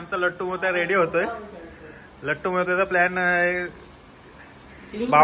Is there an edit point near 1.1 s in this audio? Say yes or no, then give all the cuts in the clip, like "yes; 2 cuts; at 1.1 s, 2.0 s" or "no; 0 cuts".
no; 0 cuts